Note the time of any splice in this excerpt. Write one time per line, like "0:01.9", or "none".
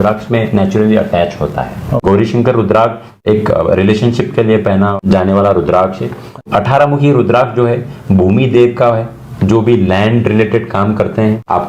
0:01.9
0:03.2
0:05.0
0:06.4